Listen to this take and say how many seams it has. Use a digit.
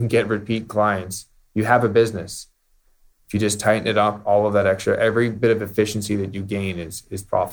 0